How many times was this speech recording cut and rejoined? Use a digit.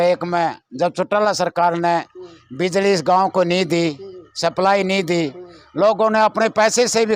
0